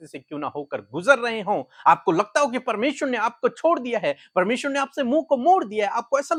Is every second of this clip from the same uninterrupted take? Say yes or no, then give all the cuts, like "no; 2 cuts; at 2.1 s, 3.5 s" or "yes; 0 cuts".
yes; 0 cuts